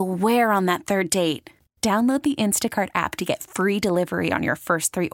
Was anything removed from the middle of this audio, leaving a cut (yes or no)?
no